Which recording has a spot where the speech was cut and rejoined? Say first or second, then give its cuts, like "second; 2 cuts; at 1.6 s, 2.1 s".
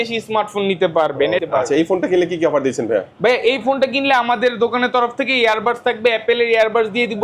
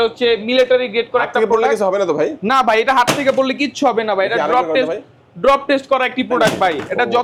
first; 1 cut; at 1.4 s